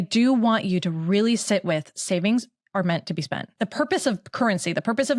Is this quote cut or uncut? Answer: cut